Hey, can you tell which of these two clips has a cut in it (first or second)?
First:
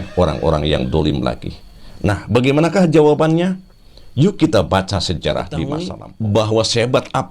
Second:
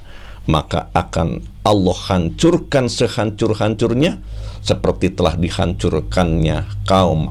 first